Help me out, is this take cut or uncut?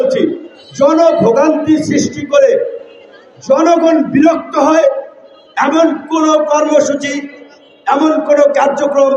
uncut